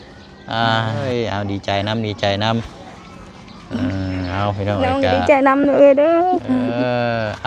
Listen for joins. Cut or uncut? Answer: cut